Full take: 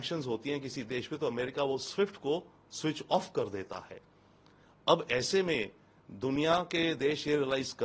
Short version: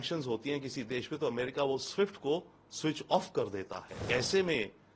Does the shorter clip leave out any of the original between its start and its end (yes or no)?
yes